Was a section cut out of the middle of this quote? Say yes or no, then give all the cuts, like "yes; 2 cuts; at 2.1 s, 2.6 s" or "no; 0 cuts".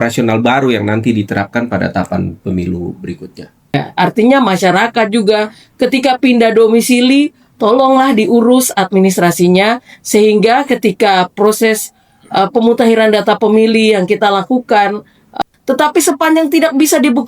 yes; 2 cuts; at 3.7 s, 15.3 s